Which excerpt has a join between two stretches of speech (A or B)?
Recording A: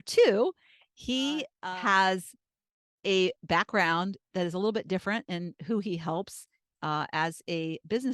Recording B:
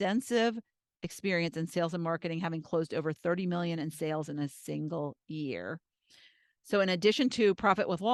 A